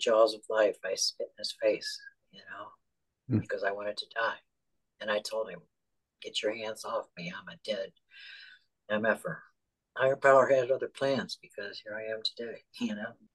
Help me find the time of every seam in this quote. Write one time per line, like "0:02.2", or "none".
none